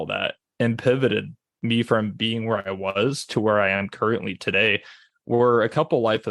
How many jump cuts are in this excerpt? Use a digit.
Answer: 1